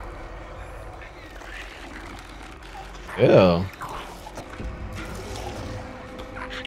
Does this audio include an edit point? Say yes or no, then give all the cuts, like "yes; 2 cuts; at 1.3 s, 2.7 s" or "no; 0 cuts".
yes; 1 cut; at 4.4 s